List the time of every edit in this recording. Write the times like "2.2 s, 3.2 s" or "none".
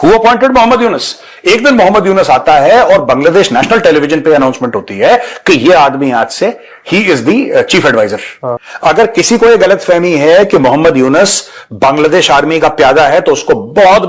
8.5 s